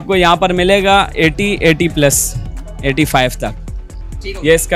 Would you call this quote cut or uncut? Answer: uncut